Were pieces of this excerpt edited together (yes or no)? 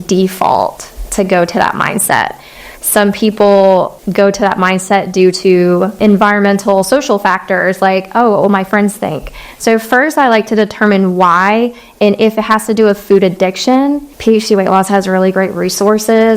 yes